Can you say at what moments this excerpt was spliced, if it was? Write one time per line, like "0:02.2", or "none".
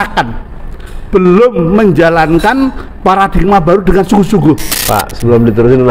0:04.7